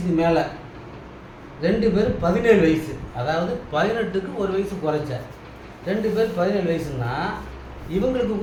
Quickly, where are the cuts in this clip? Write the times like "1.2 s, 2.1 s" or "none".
none